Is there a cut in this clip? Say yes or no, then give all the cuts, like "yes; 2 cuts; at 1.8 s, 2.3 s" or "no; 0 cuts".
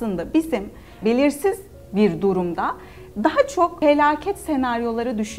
yes; 2 cuts; at 1.0 s, 3.7 s